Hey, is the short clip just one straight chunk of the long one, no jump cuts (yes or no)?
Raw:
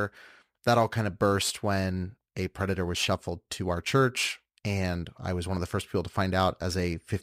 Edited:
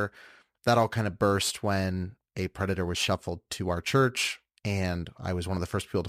yes